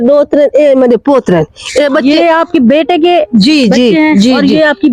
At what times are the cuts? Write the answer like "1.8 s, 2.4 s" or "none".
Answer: none